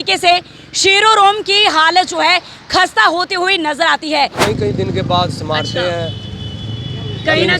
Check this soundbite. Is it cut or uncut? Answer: cut